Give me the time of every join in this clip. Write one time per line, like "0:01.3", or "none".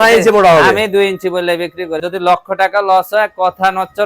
0:02.0